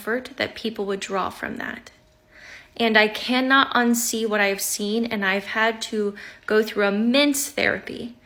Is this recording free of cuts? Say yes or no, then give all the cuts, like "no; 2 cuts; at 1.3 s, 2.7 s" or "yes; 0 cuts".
yes; 0 cuts